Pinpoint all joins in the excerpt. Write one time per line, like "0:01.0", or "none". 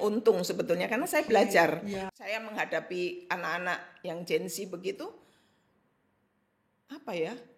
0:02.0

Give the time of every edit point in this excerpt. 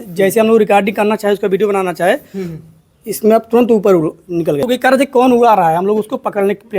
0:04.6

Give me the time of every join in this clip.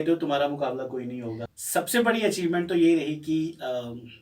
0:01.4

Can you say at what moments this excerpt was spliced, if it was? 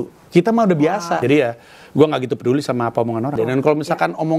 0:01.2
0:03.3

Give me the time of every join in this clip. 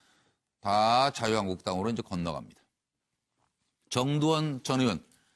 0:01.7

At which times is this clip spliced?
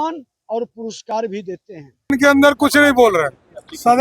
0:02.1

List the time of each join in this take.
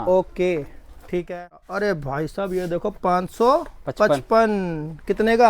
0:01.6

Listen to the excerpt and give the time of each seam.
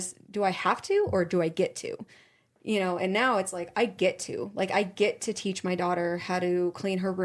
none

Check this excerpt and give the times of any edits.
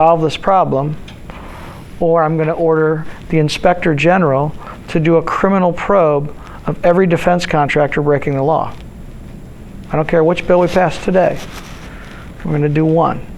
0:03.1

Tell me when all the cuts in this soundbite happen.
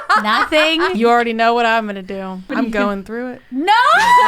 0:00.9
0:02.5

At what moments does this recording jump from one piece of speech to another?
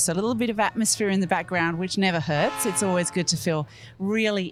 none

